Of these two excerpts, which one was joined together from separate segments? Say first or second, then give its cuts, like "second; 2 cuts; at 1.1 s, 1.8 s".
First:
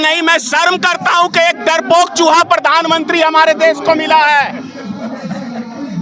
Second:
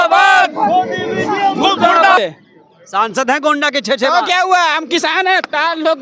second; 1 cut; at 2.2 s